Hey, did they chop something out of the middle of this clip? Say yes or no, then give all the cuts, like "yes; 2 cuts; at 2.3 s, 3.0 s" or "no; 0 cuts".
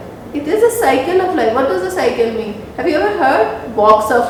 no; 0 cuts